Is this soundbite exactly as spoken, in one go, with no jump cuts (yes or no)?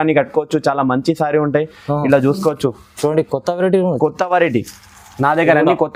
yes